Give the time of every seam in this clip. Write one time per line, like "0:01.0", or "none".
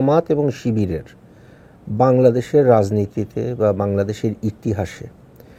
none